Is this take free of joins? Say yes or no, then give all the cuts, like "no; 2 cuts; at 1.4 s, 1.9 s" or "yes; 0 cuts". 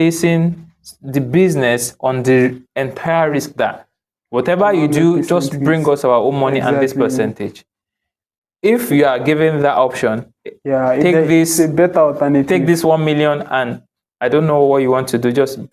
yes; 0 cuts